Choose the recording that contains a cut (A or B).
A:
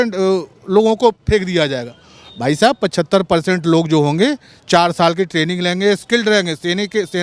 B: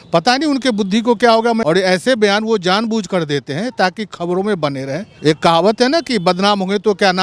B